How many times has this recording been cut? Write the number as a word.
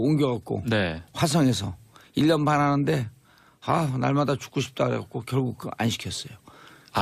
one